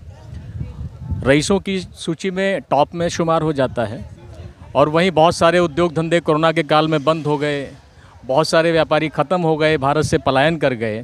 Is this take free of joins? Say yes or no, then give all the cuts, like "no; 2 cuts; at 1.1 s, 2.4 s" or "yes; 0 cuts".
yes; 0 cuts